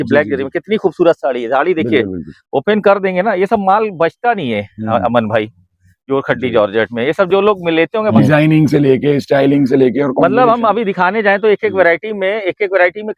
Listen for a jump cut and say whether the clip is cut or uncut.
cut